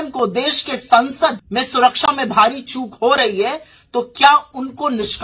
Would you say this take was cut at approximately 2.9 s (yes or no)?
no